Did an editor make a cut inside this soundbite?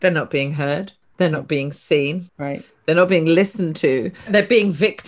yes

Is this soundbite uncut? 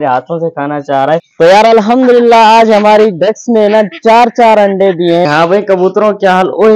no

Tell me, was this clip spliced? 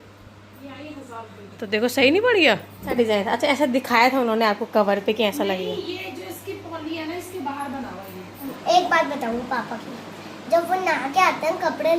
yes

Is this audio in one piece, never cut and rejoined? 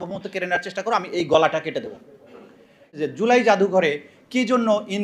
no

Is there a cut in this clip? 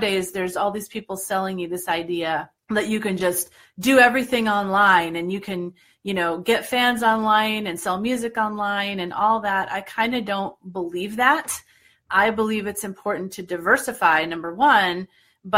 yes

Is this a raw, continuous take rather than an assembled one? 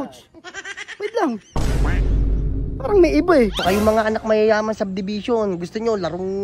no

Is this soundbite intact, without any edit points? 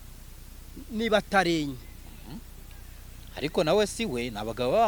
yes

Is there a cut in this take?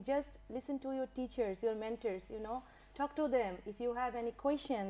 no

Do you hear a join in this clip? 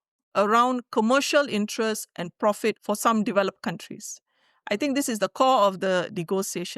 yes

